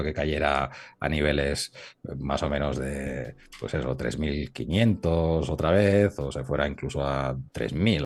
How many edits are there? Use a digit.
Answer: 0